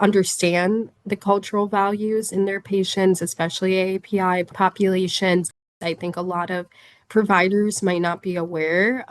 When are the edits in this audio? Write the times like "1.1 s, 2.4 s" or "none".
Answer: 4.5 s, 5.7 s

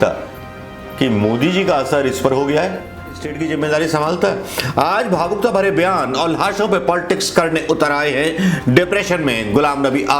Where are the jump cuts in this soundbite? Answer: 3.3 s

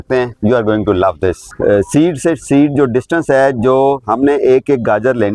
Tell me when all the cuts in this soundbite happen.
1.5 s

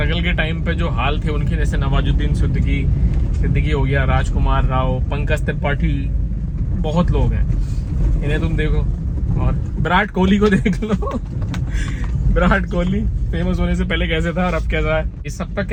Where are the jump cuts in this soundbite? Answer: none

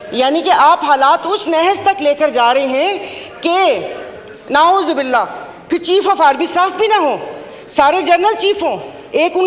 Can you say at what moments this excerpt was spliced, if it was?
none

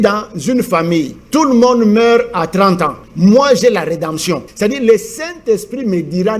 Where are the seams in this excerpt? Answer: 1.2 s, 3.0 s, 4.5 s

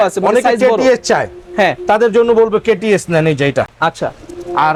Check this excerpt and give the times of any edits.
none

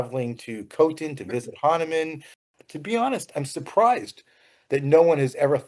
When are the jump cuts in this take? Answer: 2.6 s

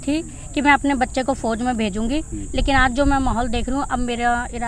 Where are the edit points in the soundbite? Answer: none

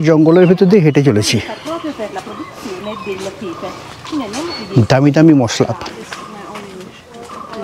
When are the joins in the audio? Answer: none

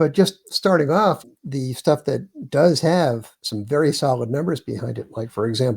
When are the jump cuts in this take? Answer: 1.2 s

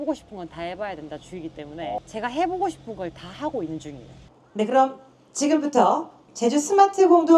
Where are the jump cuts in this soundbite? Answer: 4.3 s

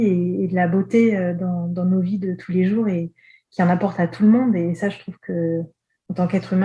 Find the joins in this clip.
none

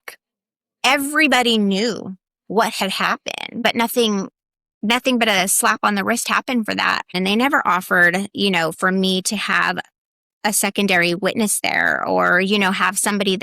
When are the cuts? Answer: 3.6 s, 7.1 s

